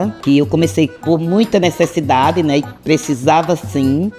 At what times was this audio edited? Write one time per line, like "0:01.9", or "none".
none